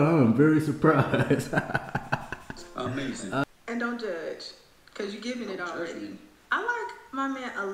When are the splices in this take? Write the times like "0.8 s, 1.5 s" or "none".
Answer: 3.4 s